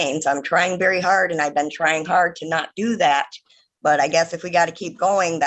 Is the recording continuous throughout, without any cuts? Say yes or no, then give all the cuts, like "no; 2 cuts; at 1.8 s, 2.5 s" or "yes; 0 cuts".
yes; 0 cuts